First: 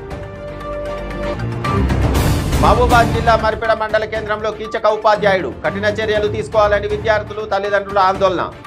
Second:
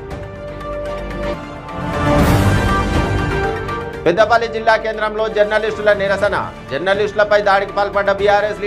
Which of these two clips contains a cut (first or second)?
first